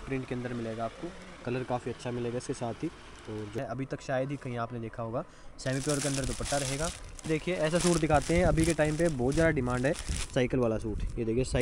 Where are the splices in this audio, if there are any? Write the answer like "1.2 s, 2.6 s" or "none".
3.6 s, 7.1 s